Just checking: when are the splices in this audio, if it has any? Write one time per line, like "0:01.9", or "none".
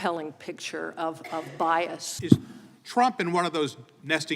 0:02.1